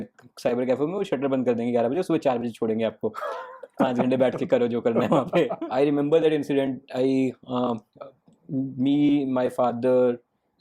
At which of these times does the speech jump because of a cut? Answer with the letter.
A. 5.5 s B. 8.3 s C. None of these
A